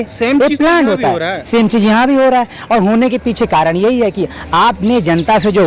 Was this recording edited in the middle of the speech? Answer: no; 0 cuts

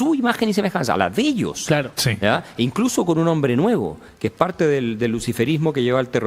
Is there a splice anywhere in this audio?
no; 0 cuts

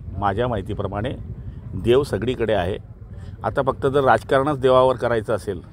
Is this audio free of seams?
yes; 0 cuts

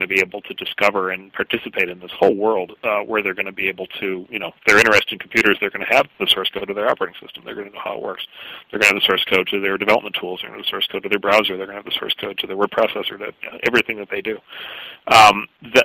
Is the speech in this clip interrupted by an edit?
no; 0 cuts

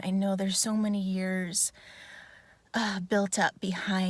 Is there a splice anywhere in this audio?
no; 0 cuts

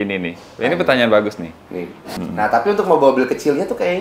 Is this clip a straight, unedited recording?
no; 1 cut; at 2.1 s

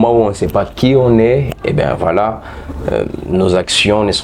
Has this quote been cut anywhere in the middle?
no; 0 cuts

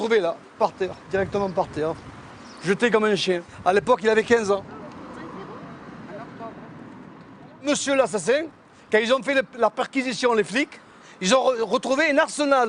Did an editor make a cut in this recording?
no; 0 cuts

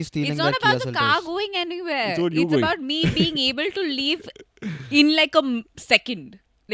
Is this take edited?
no; 0 cuts

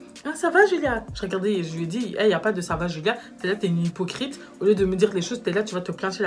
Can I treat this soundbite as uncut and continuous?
yes; 0 cuts

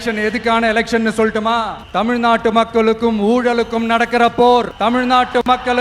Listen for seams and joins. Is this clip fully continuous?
no; 2 cuts; at 1.8 s, 4.7 s

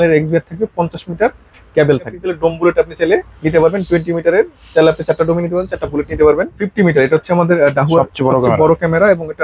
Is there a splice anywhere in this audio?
yes; 2 cuts; at 2.2 s, 6.6 s

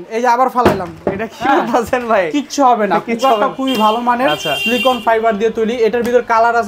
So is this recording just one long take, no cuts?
yes; 0 cuts

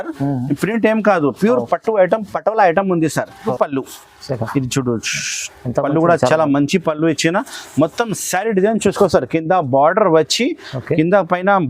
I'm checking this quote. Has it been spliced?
yes; 1 cut; at 3.5 s

